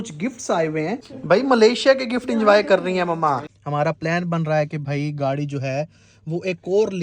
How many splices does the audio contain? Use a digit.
2